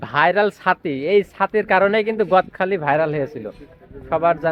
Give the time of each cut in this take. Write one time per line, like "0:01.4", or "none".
none